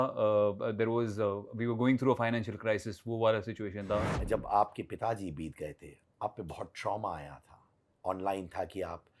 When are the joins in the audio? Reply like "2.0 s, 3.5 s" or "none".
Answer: 4.1 s